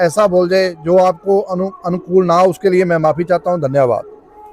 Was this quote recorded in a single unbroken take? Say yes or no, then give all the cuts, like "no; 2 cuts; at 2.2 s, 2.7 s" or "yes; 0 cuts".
yes; 0 cuts